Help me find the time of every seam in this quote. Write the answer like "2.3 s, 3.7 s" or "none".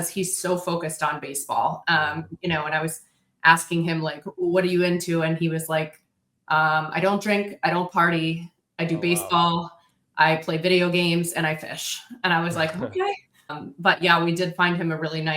13.6 s